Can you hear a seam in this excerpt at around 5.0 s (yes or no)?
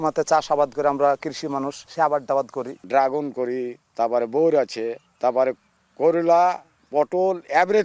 yes